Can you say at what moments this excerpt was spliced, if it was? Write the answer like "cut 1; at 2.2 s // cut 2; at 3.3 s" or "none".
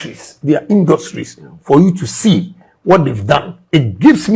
none